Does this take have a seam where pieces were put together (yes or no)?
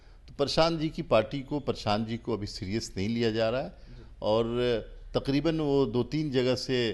no